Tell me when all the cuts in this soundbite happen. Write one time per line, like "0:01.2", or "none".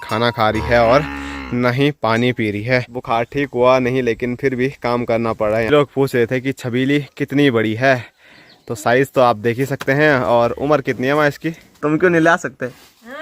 0:02.9
0:05.7
0:11.7